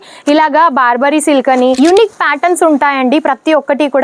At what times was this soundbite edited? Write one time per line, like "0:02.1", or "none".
0:01.8